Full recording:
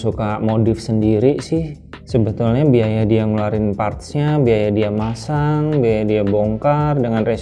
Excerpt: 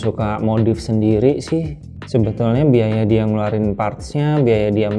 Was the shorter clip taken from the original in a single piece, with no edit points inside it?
yes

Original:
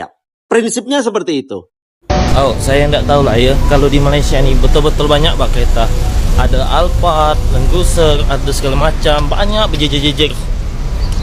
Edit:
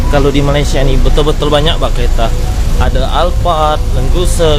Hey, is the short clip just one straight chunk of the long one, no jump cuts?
yes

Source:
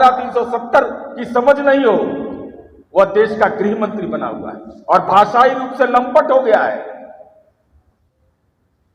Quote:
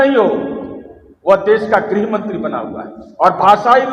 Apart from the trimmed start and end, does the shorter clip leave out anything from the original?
no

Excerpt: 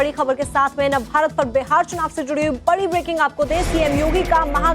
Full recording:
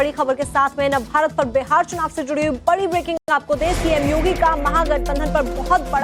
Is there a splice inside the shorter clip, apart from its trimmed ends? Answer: yes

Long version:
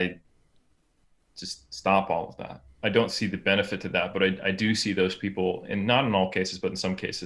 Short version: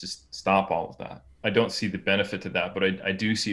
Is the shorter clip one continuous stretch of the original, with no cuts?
yes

